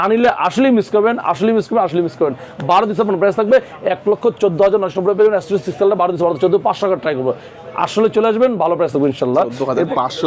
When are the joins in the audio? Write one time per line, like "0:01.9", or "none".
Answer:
none

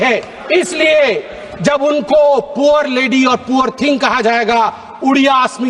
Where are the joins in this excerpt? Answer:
none

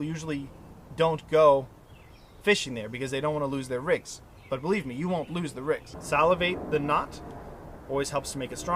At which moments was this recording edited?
0:05.9

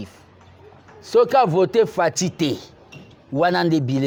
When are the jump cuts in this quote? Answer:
none

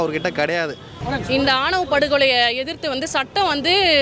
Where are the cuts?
0:00.9

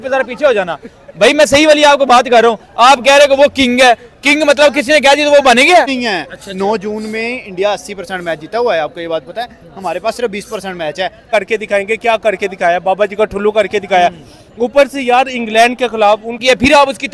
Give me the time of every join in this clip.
0:06.0
0:11.3
0:16.4

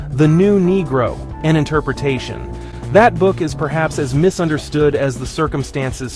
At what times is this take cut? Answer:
none

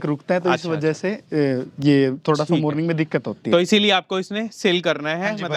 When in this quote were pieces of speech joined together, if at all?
none

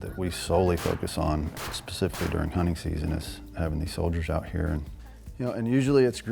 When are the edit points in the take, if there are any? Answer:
none

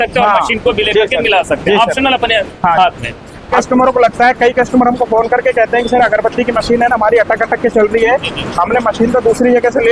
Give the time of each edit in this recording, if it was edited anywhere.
0:03.6

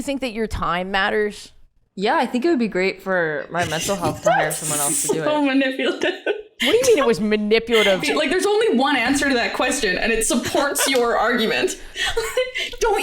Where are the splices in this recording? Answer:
0:06.5
0:08.0

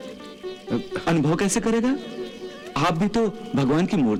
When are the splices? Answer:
none

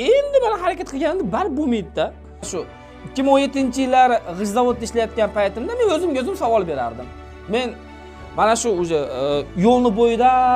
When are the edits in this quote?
0:02.5

